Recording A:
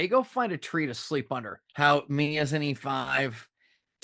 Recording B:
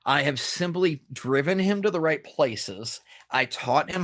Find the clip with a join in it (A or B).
A